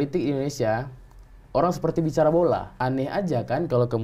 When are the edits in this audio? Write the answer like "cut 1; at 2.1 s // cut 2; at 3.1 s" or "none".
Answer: cut 1; at 2.7 s